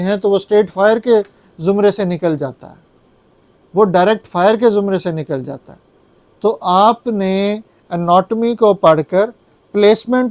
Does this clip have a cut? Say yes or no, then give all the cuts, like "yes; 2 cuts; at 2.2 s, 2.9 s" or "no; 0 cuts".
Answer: no; 0 cuts